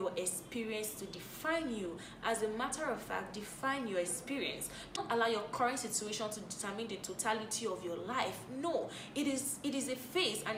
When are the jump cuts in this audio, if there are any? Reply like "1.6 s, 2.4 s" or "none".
none